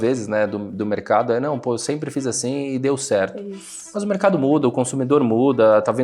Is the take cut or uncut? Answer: uncut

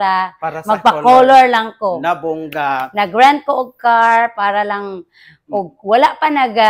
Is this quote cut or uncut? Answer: uncut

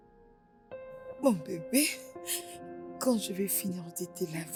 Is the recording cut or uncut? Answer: uncut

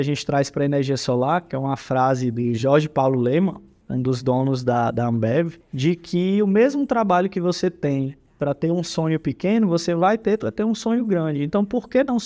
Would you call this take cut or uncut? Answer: cut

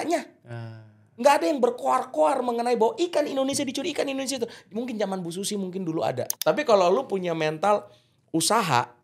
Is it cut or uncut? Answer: cut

